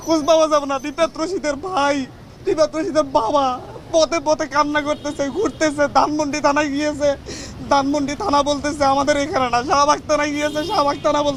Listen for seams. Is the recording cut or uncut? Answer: uncut